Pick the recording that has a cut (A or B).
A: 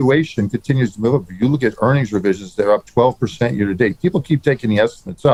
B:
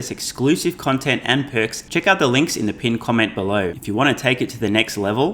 B